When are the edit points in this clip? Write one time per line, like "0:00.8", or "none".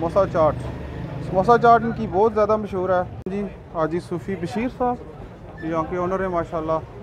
0:03.2